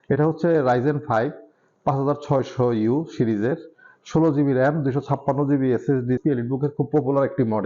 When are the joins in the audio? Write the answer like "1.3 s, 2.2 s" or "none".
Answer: 6.2 s